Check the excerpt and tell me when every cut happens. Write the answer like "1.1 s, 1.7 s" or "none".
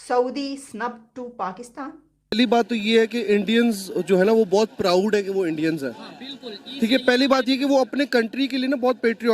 2.3 s